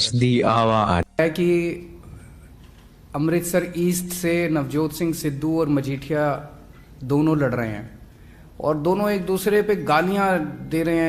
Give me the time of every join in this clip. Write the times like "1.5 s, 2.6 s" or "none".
1.2 s

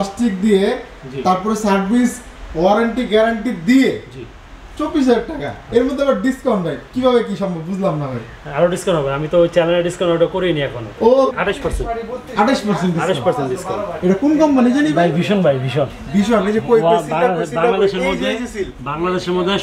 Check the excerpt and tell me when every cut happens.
11.3 s

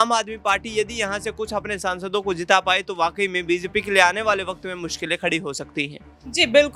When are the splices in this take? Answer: none

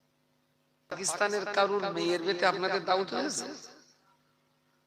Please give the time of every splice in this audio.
0.9 s

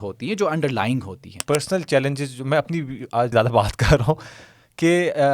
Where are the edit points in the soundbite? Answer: 1.3 s, 3.3 s

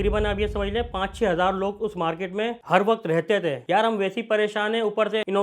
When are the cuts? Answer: 3.6 s

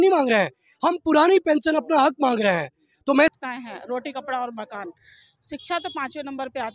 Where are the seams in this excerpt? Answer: 3.3 s

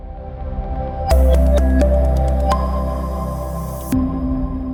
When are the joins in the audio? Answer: none

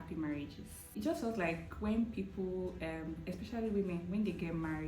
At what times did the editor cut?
0.9 s

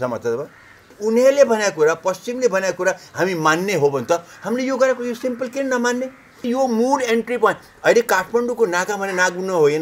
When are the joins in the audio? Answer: 0.9 s, 6.3 s

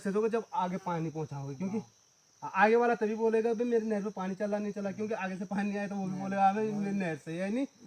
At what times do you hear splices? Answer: none

